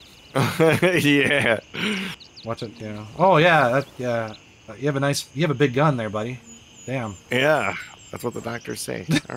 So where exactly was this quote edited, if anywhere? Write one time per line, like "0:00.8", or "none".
none

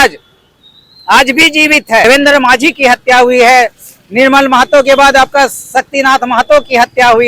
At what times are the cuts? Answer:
0:02.0

